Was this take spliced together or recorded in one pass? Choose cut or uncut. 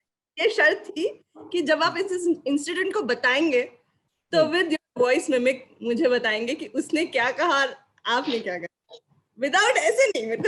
uncut